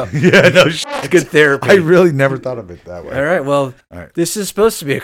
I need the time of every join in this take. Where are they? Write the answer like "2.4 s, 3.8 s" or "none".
none